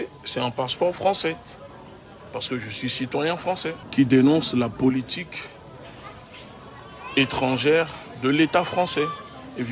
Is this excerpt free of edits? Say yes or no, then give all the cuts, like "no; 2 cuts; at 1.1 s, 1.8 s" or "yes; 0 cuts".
no; 1 cut; at 3.8 s